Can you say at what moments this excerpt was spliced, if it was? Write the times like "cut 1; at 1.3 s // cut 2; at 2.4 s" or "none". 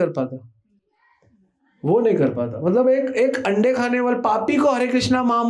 none

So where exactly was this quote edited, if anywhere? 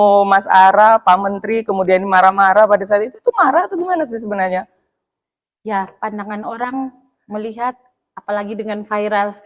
none

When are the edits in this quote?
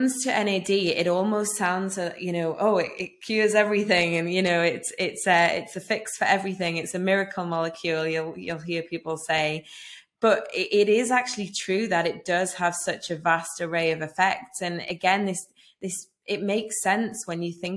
none

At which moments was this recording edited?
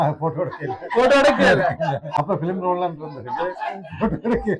cut 1; at 2.1 s

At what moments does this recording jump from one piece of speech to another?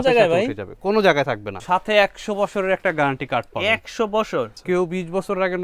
cut 1; at 1.5 s // cut 2; at 4.6 s

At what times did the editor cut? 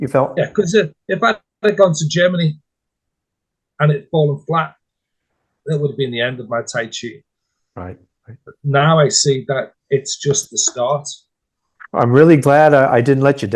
none

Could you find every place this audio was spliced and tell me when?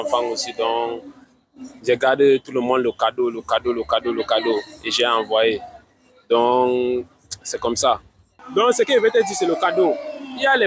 cut 1; at 8.3 s

